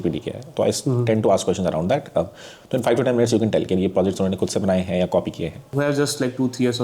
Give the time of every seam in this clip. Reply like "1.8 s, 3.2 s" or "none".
5.6 s